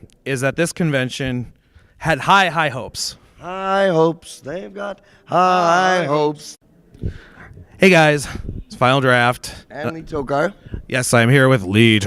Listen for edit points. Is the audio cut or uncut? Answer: uncut